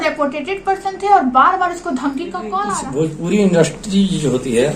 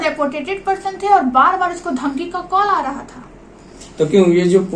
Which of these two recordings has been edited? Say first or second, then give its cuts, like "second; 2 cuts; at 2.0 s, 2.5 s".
first; 1 cut; at 2.8 s